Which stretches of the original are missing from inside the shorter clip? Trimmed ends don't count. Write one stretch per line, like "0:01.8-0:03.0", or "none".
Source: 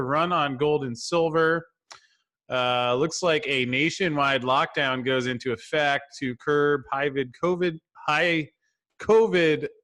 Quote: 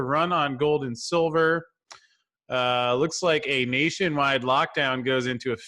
none